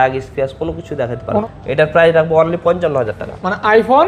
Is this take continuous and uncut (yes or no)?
no